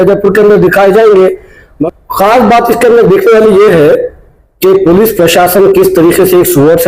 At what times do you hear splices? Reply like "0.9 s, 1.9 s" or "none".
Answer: 1.7 s